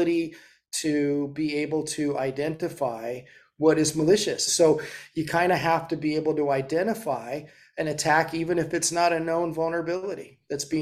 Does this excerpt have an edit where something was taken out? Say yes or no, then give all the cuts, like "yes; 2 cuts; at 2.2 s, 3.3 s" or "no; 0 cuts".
yes; 1 cut; at 4.5 s